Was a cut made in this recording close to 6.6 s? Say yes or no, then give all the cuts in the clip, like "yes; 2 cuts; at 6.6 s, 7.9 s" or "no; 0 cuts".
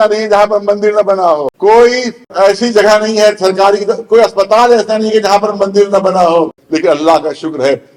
yes; 3 cuts; at 1.5 s, 2.3 s, 6.6 s